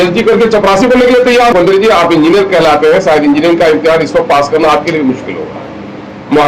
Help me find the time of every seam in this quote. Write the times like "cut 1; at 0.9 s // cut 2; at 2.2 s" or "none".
cut 1; at 1.5 s